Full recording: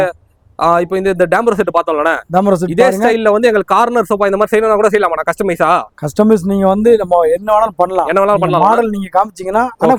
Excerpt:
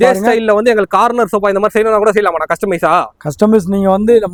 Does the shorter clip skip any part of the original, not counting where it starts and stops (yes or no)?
no